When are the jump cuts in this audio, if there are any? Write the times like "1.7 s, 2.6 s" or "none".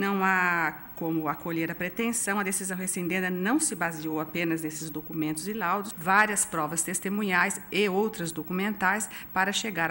5.9 s